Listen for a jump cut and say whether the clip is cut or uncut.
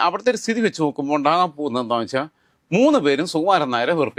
uncut